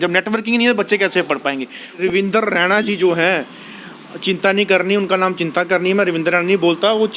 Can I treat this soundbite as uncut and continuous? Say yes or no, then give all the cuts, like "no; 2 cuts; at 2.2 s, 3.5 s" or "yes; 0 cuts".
no; 1 cut; at 2.0 s